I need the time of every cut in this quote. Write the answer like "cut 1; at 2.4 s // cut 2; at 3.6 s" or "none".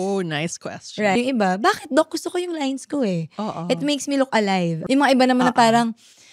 cut 1; at 1.2 s // cut 2; at 4.7 s